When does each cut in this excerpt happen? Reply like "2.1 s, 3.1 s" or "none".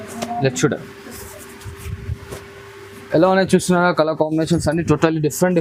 none